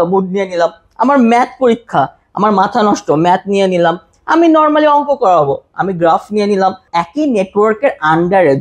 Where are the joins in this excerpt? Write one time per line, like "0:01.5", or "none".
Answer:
0:06.8